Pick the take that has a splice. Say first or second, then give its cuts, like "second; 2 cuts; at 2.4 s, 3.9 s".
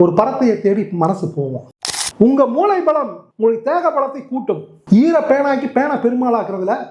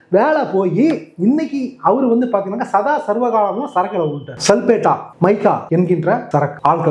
first; 1 cut; at 1.7 s